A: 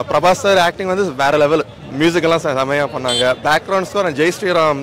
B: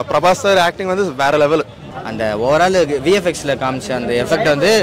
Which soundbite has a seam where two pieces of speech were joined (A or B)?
B